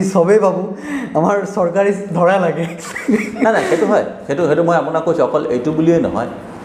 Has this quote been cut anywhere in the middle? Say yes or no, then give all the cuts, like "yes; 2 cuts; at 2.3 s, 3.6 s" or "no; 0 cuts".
no; 0 cuts